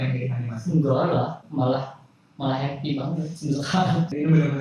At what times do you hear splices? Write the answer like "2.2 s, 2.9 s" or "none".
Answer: 1.4 s